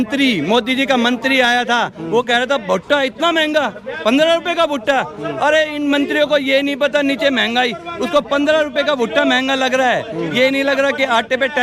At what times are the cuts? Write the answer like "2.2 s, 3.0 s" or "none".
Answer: none